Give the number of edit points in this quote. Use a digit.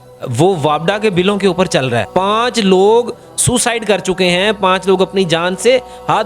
1